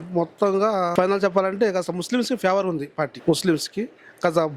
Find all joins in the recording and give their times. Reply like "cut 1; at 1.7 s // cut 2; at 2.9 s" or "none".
cut 1; at 0.9 s // cut 2; at 3.2 s